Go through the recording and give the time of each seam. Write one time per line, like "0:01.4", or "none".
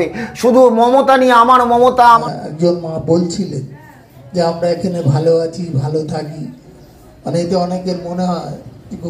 0:02.2